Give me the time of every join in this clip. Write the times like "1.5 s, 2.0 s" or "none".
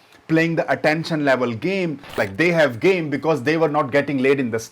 2.1 s